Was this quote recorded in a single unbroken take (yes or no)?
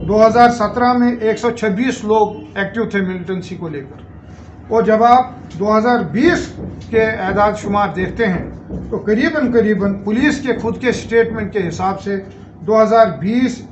yes